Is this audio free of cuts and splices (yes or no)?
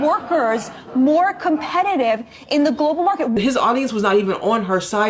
no